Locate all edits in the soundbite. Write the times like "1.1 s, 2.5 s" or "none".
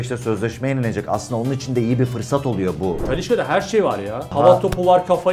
3.0 s, 4.3 s